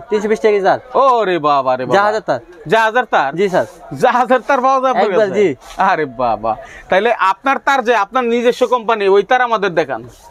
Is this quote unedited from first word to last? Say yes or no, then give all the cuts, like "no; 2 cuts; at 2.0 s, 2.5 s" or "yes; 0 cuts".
yes; 0 cuts